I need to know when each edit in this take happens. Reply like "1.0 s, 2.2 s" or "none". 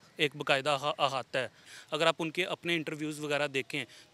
1.6 s